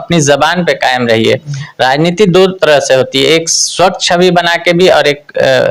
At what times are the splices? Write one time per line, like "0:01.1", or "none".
none